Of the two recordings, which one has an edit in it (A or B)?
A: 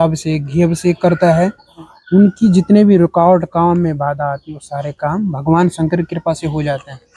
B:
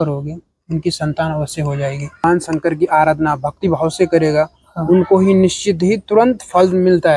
B